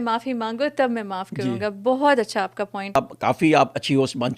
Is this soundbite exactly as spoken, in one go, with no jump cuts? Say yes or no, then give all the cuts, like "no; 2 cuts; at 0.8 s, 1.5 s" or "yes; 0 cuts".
no; 1 cut; at 3.0 s